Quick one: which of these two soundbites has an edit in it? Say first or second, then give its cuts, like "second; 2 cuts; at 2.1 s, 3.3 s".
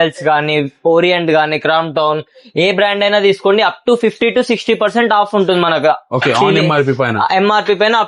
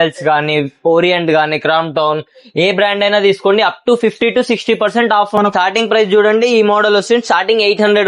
second; 1 cut; at 5.4 s